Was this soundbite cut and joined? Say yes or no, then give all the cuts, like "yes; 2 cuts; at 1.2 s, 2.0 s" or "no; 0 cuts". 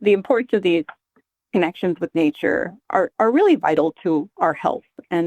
no; 0 cuts